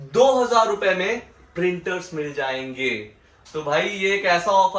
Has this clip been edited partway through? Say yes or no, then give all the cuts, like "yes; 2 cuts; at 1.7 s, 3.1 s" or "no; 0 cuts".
no; 0 cuts